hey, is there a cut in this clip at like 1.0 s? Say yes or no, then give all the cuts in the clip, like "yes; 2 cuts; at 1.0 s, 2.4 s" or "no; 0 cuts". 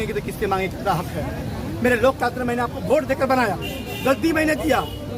no; 0 cuts